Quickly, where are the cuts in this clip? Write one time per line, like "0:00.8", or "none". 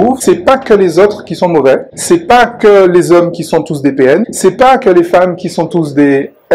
none